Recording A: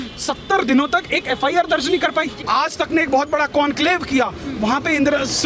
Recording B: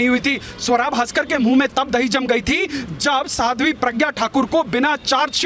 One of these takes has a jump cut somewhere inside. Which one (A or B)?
A